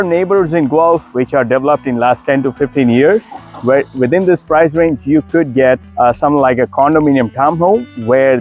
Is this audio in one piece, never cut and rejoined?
yes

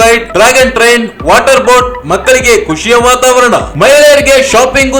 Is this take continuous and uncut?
yes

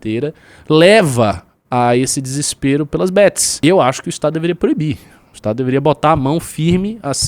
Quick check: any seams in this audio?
yes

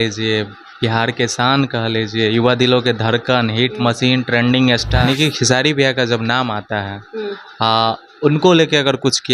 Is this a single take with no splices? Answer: no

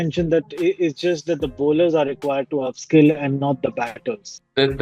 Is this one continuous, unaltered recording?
yes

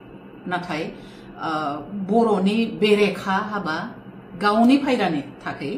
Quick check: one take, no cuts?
yes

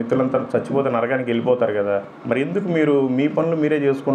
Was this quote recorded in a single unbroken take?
yes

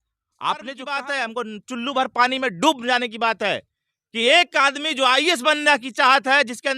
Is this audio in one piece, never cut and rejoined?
no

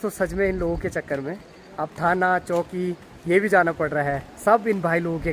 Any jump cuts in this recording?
no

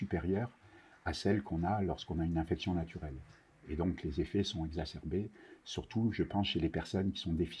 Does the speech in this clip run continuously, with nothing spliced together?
yes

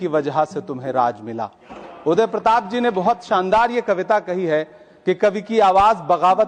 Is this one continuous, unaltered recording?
yes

